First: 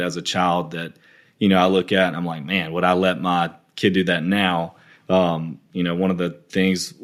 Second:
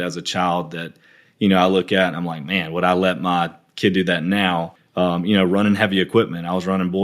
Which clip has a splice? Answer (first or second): second